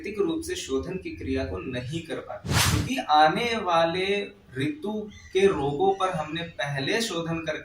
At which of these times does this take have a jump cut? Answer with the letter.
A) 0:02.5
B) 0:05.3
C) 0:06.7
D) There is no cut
A